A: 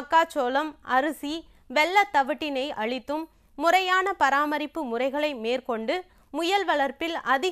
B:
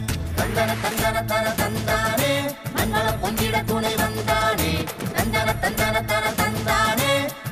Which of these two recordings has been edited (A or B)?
A